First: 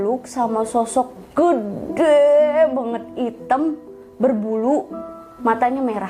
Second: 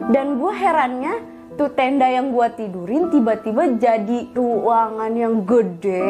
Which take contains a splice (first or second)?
second